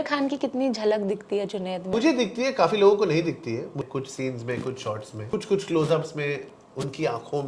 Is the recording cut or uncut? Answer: cut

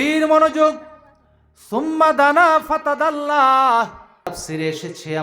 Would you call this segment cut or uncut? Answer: cut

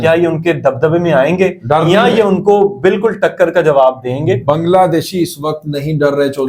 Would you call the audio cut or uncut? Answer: uncut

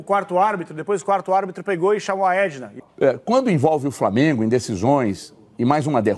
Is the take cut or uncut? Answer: cut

